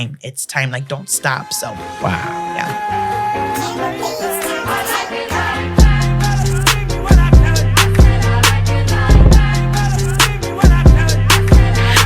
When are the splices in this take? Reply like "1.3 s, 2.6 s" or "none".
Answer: none